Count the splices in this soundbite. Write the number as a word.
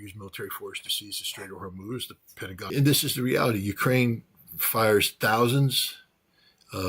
one